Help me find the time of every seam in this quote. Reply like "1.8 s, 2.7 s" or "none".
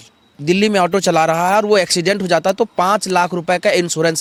none